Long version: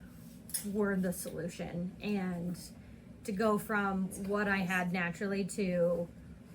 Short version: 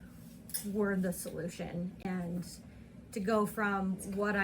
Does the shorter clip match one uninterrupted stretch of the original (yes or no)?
no